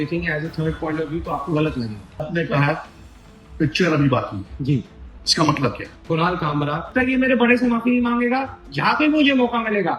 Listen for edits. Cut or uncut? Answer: cut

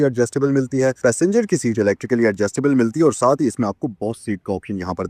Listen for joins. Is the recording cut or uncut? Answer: uncut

